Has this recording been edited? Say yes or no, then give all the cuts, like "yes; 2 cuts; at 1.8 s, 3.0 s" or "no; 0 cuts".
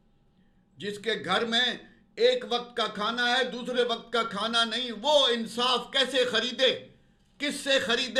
no; 0 cuts